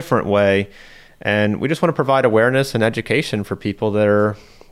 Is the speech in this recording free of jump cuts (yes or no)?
no